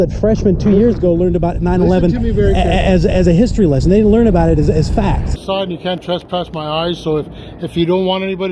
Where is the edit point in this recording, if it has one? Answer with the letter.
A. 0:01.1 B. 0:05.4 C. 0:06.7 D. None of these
B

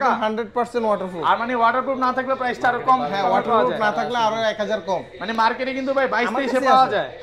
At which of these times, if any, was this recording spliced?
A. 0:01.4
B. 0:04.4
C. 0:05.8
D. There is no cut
D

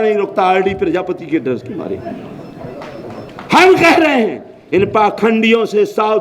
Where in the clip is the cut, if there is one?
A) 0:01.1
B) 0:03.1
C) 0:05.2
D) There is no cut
D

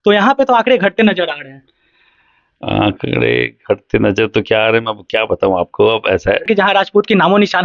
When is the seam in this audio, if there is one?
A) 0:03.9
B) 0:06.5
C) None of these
B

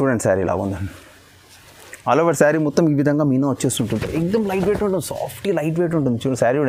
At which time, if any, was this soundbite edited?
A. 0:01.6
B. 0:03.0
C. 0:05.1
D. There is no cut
D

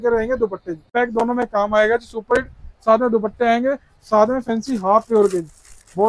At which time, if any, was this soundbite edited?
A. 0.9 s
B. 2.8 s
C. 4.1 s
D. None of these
A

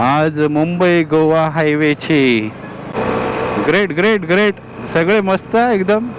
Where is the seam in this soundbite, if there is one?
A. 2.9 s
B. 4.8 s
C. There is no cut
A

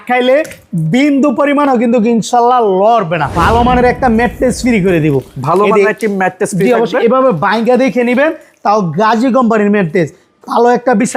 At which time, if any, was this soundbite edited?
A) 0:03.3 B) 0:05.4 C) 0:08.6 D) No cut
A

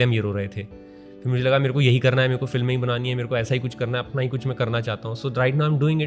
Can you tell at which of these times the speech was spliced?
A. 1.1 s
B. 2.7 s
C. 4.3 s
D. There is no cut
D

